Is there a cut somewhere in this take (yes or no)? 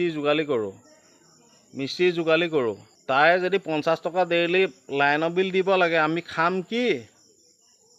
yes